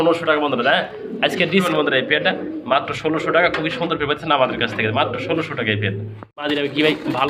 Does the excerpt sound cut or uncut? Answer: cut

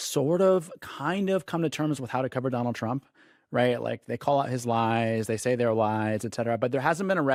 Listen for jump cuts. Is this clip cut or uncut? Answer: uncut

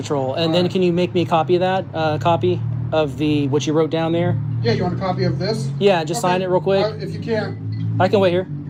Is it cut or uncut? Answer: uncut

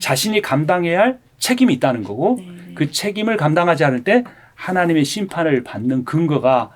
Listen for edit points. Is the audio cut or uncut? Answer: uncut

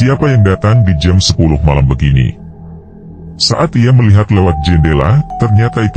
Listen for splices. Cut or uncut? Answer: uncut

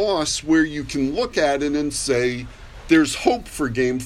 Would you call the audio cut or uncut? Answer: uncut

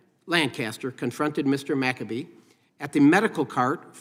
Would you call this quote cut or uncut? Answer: uncut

